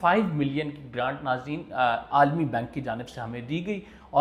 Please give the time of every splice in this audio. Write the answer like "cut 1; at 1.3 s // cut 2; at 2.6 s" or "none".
none